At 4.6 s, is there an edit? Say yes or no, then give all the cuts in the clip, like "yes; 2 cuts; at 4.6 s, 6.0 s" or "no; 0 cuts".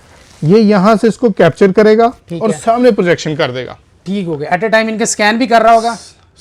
no; 0 cuts